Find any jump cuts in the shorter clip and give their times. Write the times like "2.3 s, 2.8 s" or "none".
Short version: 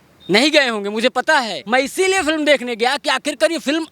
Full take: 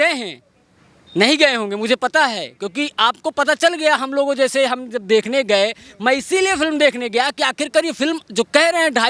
1.6 s